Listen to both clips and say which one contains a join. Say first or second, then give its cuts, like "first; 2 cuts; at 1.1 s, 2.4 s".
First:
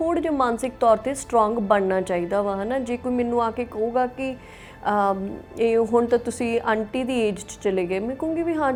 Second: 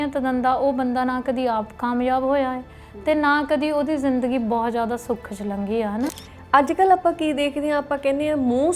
second; 1 cut; at 6.0 s